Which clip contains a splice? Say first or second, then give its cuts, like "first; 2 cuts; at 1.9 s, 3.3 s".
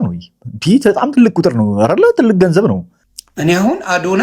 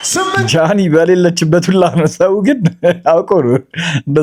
first; 1 cut; at 2.9 s